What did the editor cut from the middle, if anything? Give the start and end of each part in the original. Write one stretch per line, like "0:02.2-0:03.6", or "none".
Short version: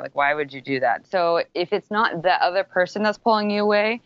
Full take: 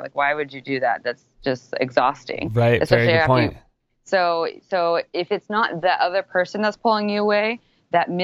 0:01.0-0:04.6